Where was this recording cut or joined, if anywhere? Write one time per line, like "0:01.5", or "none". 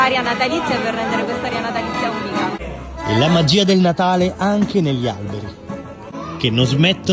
0:06.1